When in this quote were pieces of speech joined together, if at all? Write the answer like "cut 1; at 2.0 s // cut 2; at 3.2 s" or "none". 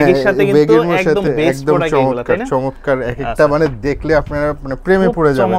none